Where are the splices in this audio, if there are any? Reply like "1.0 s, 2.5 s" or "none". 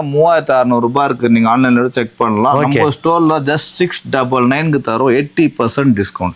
none